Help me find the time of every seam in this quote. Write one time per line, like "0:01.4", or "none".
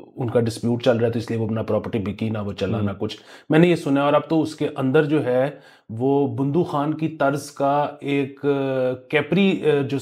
none